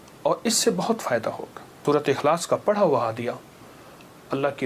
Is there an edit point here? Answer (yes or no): yes